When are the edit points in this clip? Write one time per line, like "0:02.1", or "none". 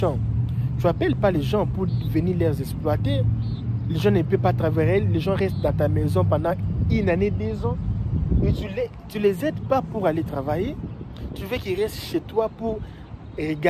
none